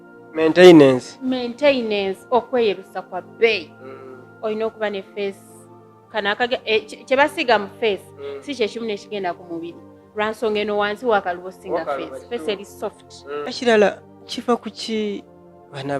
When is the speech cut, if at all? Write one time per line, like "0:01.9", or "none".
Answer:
0:13.4

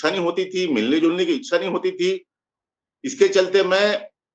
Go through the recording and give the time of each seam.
none

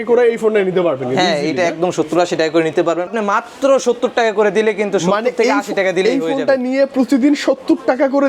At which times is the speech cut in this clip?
0:03.1

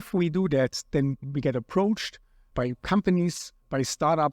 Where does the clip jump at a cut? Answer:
0:01.2

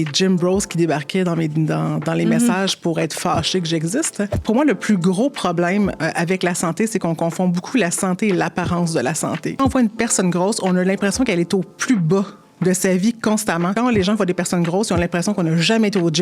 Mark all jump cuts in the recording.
0:04.4
0:09.6
0:13.7

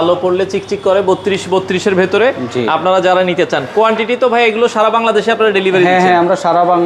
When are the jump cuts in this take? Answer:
none

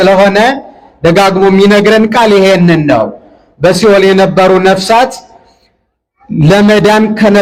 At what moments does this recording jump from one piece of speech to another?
none

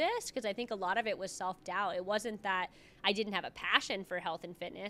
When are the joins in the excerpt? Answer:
none

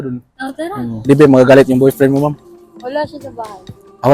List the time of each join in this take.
0:01.0

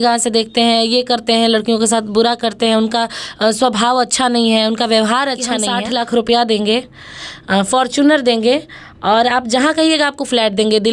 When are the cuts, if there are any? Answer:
0:05.7

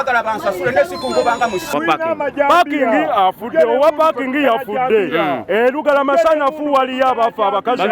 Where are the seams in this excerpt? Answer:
0:01.7

